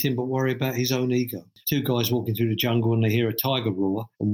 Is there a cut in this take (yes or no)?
yes